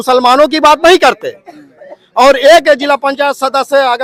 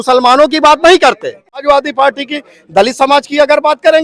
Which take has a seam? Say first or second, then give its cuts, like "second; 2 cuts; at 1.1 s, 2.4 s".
second; 1 cut; at 1.6 s